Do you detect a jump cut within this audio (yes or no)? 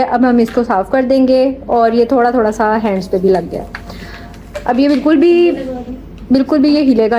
no